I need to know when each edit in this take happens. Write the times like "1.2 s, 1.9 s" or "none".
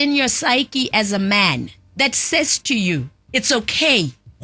1.8 s